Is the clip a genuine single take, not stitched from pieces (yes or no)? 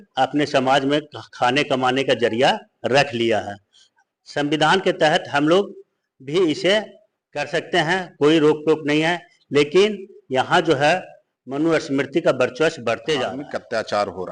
no